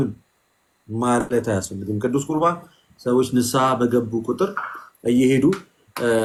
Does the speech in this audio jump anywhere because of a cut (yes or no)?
no